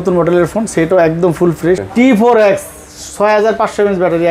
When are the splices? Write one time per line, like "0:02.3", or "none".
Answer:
0:01.9